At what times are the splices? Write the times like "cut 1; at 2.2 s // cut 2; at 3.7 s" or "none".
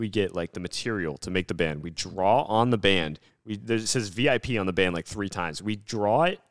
none